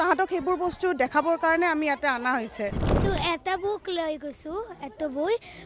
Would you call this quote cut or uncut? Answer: cut